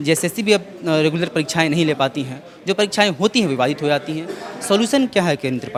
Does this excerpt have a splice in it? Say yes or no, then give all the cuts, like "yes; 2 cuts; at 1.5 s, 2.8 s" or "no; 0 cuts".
no; 0 cuts